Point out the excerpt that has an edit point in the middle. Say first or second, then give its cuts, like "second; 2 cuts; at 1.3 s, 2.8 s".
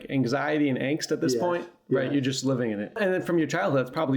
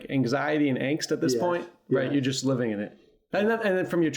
first; 1 cut; at 3.0 s